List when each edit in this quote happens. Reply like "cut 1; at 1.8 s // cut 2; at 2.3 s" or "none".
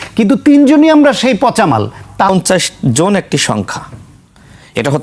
cut 1; at 2.3 s